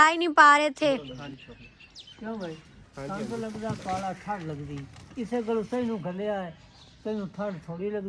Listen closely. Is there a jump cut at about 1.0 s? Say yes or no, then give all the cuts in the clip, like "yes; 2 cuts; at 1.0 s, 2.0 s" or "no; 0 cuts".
yes; 1 cut; at 1.0 s